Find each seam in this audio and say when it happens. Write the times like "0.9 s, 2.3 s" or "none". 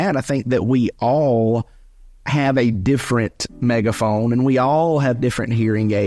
none